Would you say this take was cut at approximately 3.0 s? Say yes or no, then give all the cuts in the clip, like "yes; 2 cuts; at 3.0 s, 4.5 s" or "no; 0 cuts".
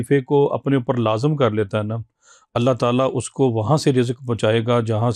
no; 0 cuts